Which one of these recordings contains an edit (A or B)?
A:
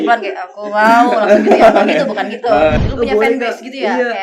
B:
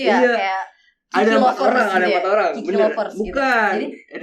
A